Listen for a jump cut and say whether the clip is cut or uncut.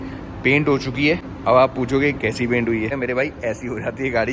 cut